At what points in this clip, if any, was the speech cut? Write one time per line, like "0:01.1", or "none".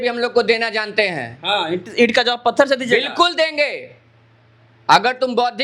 none